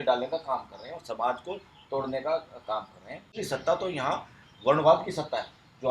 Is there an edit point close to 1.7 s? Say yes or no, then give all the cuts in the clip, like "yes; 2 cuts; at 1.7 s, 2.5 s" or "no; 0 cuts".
no; 1 cut; at 3.4 s